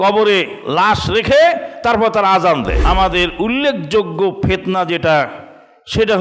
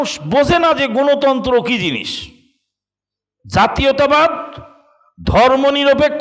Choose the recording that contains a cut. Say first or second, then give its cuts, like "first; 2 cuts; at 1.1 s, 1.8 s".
first; 1 cut; at 2.8 s